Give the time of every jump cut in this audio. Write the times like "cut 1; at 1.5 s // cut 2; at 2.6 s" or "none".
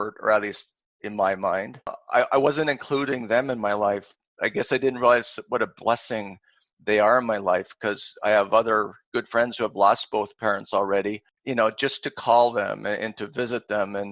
cut 1; at 2.0 s // cut 2; at 11.3 s